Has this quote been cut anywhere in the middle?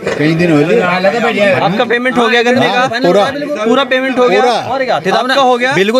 no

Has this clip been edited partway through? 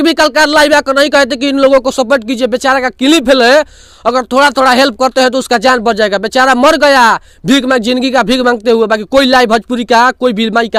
no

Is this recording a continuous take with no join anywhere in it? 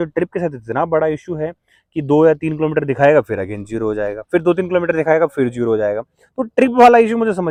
yes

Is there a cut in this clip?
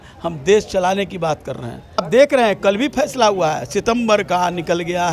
yes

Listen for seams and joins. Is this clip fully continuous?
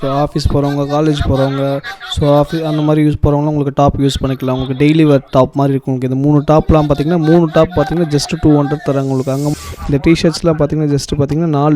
no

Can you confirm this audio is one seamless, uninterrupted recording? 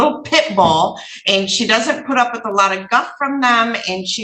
yes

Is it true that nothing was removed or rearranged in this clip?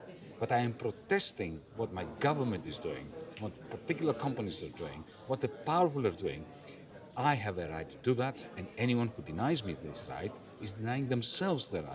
yes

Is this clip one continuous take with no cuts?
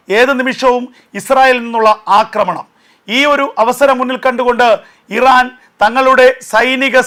yes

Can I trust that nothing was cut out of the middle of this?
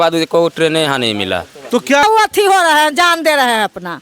no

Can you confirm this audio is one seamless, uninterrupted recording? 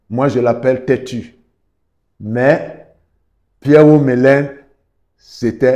yes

